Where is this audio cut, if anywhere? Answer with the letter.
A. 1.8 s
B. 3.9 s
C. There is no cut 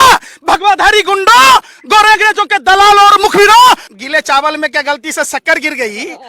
B